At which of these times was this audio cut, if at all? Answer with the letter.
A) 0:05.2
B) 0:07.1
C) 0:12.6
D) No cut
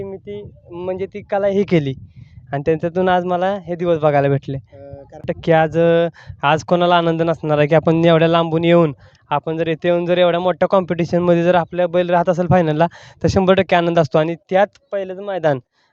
A